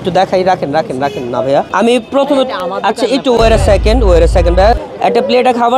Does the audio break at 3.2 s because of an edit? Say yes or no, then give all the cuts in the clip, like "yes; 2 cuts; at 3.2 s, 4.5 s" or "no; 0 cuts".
no; 2 cuts; at 1.7 s, 4.6 s